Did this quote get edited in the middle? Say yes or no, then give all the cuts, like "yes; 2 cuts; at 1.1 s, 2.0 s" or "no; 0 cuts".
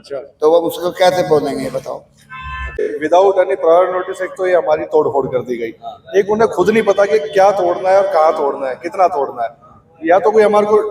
yes; 1 cut; at 2.9 s